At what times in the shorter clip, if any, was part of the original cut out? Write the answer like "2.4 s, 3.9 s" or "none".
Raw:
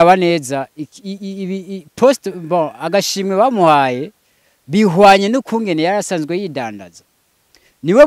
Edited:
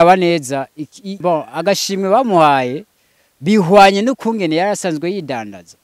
1.1 s